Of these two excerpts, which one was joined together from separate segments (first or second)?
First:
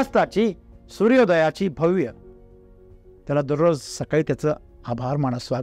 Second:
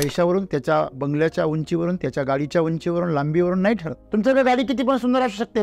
second